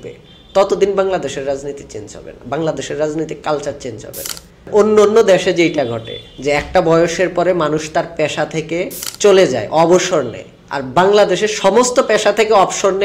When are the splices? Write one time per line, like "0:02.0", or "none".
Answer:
0:04.7
0:09.0